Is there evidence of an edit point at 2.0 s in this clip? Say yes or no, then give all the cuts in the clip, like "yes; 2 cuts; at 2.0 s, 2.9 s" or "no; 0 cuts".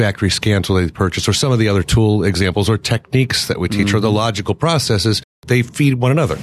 no; 1 cut; at 5.4 s